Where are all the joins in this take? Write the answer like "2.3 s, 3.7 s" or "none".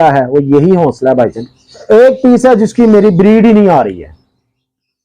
1.8 s